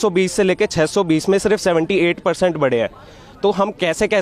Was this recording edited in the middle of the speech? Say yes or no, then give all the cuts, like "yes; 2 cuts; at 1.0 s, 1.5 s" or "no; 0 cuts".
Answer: no; 0 cuts